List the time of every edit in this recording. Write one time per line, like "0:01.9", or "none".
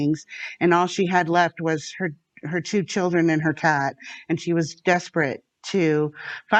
none

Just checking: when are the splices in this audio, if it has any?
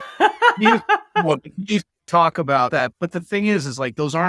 0:02.8

